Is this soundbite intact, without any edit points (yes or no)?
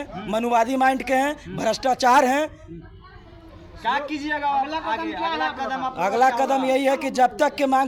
yes